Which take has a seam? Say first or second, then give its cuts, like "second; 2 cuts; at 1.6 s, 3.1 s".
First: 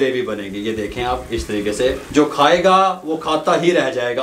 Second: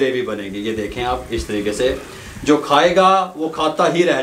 first; 1 cut; at 2.0 s